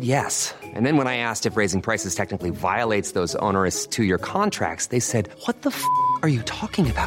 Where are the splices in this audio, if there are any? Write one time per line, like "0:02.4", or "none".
none